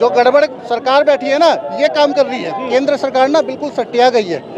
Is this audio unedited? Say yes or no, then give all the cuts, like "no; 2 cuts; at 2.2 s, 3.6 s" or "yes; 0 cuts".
no; 1 cut; at 2.6 s